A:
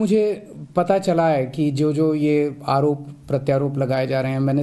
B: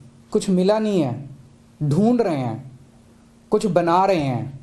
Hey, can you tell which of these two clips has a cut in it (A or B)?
B